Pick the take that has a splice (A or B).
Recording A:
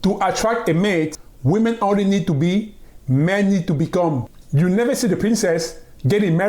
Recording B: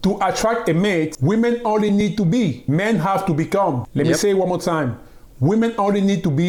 A